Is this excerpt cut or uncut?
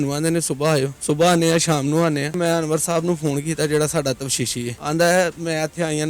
cut